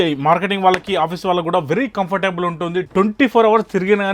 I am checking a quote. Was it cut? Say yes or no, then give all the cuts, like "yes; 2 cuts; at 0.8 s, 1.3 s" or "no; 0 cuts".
no; 0 cuts